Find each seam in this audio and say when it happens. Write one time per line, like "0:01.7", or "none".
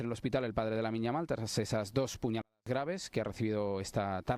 none